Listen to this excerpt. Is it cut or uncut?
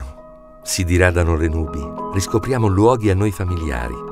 uncut